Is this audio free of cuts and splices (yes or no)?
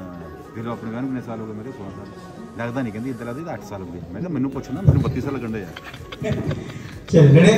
yes